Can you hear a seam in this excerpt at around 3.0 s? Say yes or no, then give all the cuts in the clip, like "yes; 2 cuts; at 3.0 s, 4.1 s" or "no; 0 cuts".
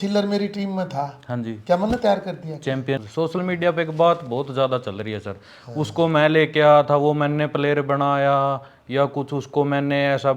yes; 1 cut; at 3.0 s